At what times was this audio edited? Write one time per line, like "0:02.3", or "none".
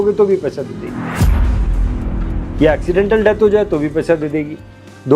none